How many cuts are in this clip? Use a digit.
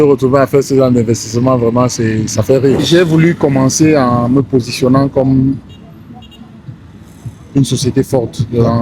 1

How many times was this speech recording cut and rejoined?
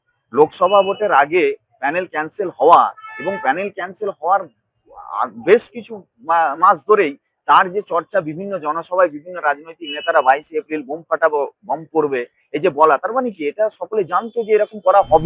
0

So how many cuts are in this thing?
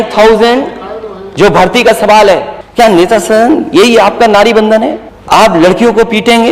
2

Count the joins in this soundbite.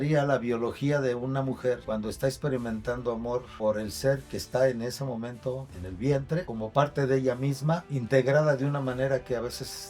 4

